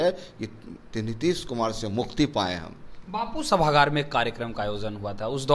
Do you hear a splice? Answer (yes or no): no